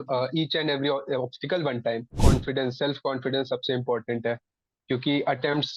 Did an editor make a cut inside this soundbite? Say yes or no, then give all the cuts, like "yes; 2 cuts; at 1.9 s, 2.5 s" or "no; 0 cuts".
yes; 1 cut; at 2.2 s